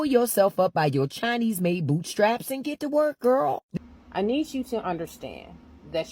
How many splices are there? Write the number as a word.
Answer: one